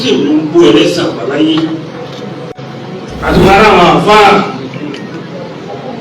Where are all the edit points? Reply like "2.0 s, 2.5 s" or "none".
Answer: 2.6 s